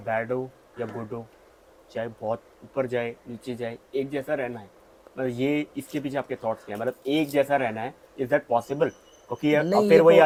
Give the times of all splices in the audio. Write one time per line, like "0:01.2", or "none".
none

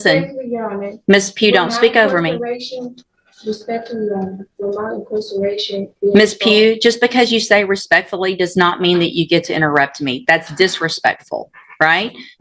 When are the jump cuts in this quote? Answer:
none

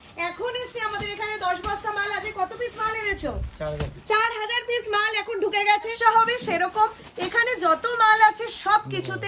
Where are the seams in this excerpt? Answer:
0:05.9

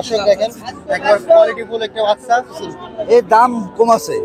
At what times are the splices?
0:02.6

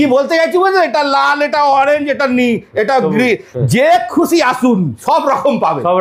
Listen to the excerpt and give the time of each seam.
none

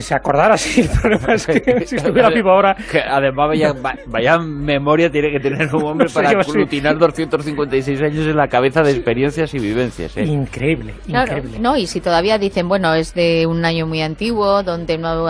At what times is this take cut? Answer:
0:05.5

